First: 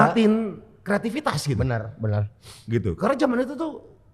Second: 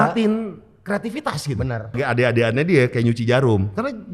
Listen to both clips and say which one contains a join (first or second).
second